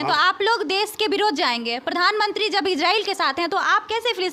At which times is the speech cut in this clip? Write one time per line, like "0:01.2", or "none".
none